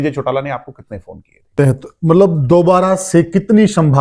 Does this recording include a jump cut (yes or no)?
yes